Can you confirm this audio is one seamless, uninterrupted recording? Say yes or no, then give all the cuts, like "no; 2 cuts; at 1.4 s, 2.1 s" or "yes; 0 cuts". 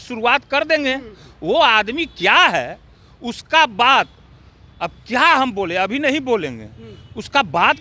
yes; 0 cuts